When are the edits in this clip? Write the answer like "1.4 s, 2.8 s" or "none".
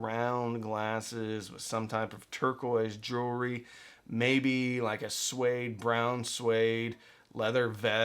none